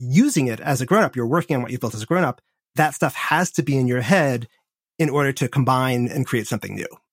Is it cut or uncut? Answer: uncut